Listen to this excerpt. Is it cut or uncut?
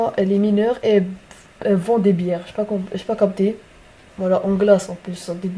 uncut